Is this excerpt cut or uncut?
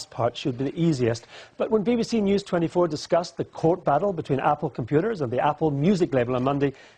uncut